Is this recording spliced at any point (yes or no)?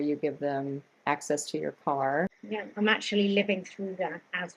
yes